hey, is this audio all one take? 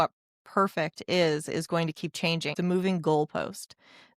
no; 1 cut; at 2.5 s

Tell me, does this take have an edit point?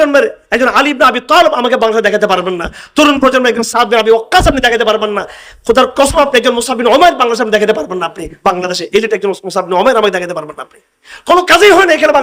no; 0 cuts

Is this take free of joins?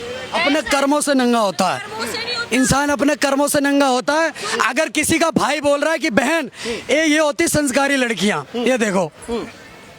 yes; 0 cuts

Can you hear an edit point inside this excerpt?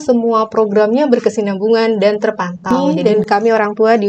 yes; 1 cut; at 2.7 s

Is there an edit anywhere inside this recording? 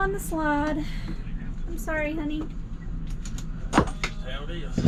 no; 0 cuts

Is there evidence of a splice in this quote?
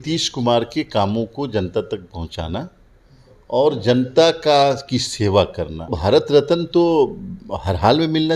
yes; 1 cut; at 5.9 s

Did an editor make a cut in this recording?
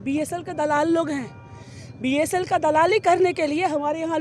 no; 0 cuts

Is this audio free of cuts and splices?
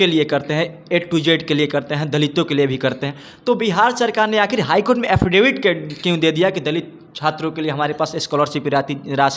yes; 0 cuts

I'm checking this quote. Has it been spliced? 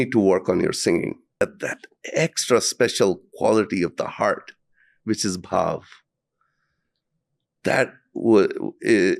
yes; 1 cut; at 1.4 s

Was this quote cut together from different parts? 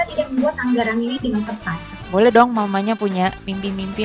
yes; 1 cut; at 2.0 s

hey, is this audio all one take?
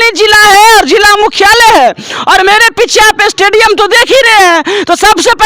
yes; 0 cuts

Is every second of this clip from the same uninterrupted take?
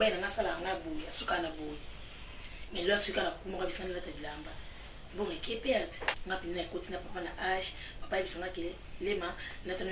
no; 1 cut; at 6.2 s

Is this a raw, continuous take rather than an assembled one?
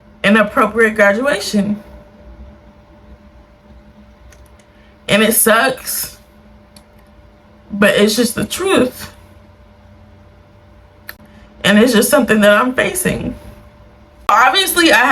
yes; 0 cuts

